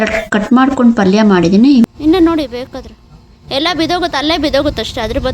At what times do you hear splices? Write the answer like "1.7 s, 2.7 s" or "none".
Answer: 1.9 s